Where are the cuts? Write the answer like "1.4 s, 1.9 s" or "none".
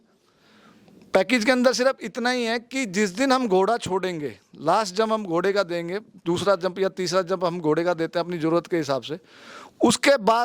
none